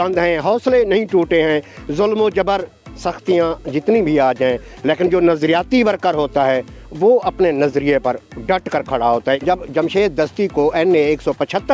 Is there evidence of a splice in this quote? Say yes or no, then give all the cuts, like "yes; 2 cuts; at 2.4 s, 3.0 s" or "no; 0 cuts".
yes; 1 cut; at 9.4 s